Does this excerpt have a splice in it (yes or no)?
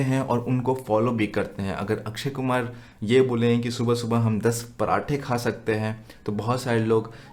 no